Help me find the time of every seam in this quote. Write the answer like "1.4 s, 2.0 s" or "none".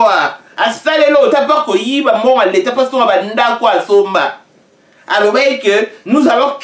none

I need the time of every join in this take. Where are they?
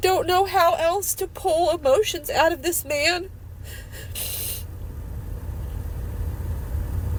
none

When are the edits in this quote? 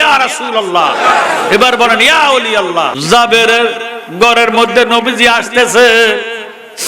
2.9 s

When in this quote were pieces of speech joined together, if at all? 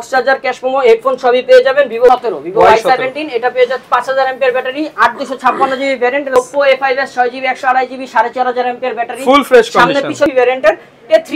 2.1 s, 6.4 s, 10.3 s

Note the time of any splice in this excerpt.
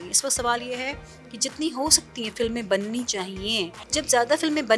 3.9 s

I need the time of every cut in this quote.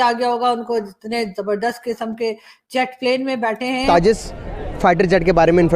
3.8 s

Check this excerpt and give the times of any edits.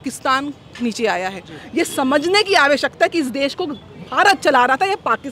none

